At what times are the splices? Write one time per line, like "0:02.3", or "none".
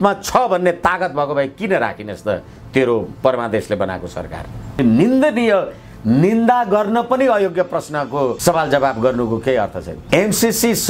0:04.8
0:08.4
0:09.9